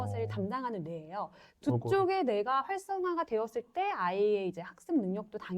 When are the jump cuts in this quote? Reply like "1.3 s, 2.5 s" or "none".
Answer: 1.4 s